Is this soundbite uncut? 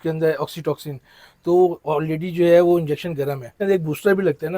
no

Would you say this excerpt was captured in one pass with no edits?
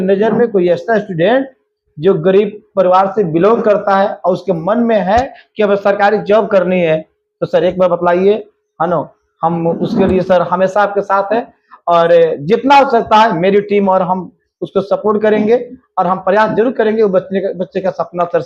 yes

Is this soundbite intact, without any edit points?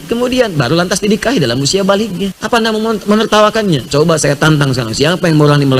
no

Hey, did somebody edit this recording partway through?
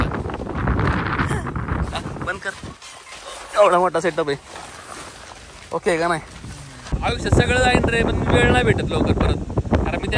yes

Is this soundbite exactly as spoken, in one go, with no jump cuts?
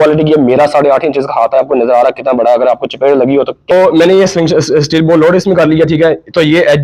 no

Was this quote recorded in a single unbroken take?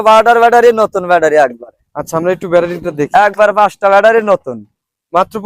yes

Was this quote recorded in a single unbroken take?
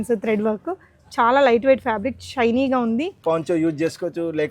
no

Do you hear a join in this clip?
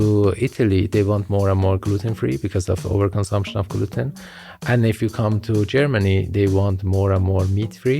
yes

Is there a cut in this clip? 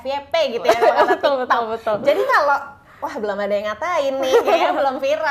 no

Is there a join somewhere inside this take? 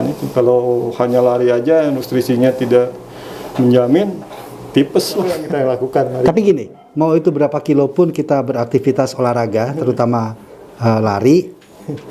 yes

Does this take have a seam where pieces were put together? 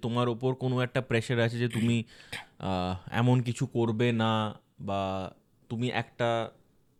no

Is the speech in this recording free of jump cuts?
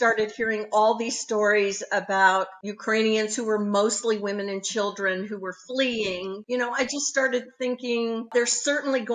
no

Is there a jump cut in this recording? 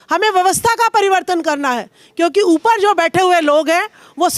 no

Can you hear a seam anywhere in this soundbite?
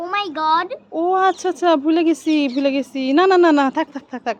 no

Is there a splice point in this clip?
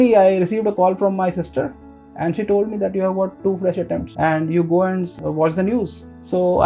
yes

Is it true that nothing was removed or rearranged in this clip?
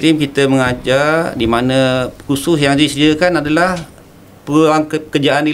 yes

